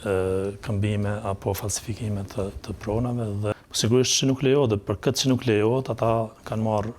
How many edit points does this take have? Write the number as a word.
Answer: one